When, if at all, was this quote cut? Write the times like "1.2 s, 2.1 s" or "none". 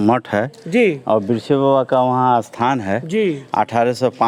none

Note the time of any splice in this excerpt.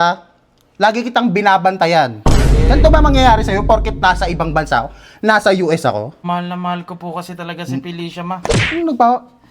6.2 s

